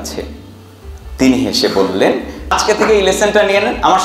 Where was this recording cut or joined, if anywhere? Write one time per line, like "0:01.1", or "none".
0:02.5